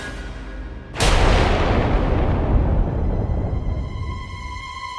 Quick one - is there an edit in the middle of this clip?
no; 0 cuts

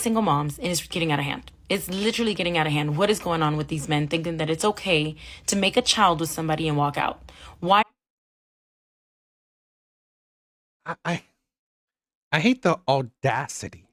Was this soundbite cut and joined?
no; 0 cuts

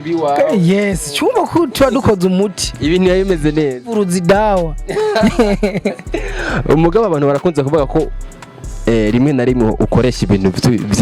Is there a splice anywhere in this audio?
no; 0 cuts

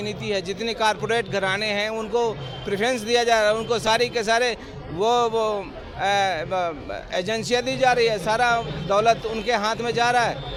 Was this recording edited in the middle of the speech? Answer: no; 0 cuts

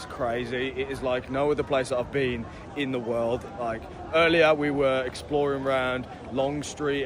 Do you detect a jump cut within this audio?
no; 0 cuts

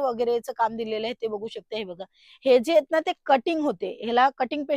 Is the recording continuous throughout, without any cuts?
yes; 0 cuts

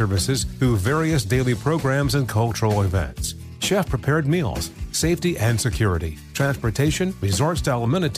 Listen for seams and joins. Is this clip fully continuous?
yes; 0 cuts

